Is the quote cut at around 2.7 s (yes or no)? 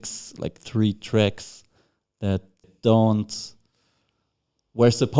yes